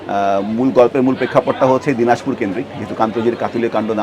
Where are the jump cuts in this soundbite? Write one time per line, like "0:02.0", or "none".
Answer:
none